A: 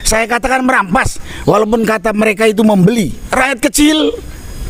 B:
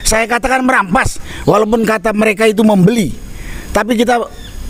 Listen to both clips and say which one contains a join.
A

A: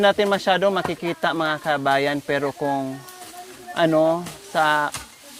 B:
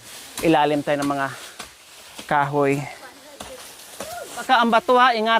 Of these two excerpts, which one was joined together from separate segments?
B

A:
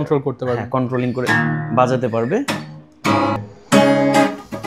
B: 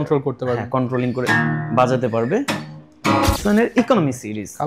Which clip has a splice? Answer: B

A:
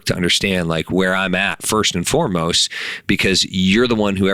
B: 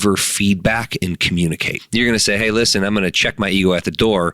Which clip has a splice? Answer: B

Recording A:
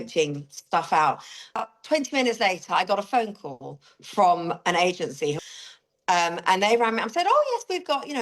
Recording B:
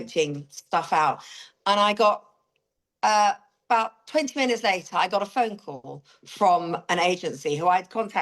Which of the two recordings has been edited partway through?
A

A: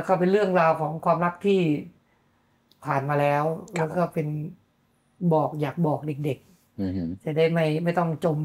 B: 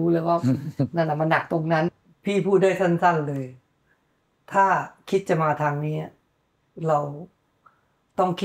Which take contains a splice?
B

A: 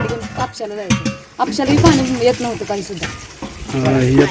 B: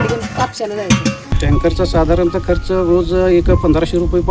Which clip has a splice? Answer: B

